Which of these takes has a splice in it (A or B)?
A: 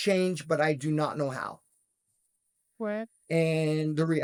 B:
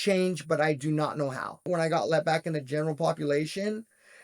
B